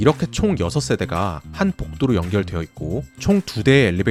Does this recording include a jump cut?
no; 0 cuts

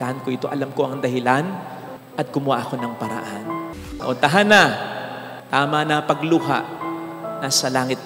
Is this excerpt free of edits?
no; 1 cut; at 4.0 s

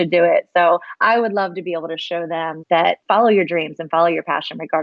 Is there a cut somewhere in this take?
yes; 1 cut; at 3.0 s

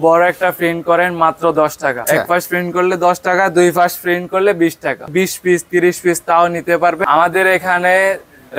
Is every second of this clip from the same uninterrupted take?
no; 3 cuts; at 2.0 s, 5.1 s, 7.0 s

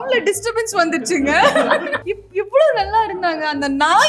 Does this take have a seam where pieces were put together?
yes; 1 cut; at 2.0 s

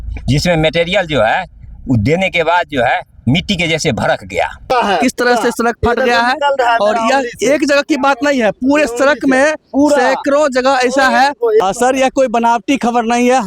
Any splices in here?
yes; 2 cuts; at 4.7 s, 11.6 s

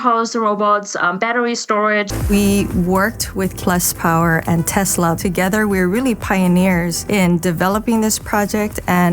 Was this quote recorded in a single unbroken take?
no; 1 cut; at 2.2 s

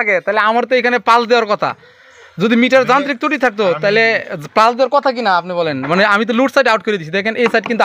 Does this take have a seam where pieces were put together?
no; 0 cuts

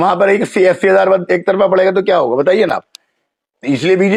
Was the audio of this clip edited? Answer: no; 0 cuts

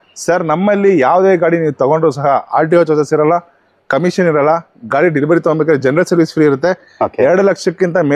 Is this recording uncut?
yes; 0 cuts

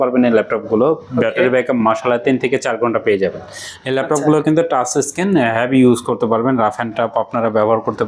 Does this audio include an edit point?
no; 0 cuts

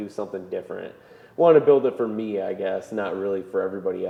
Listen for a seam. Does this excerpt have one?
no; 0 cuts

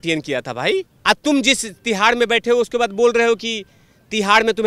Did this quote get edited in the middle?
yes; 1 cut; at 0.9 s

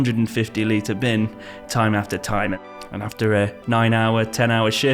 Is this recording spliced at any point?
yes; 1 cut; at 2.5 s

